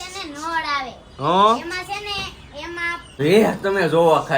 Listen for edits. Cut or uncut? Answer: cut